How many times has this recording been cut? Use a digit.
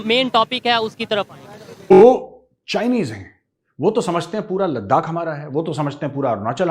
1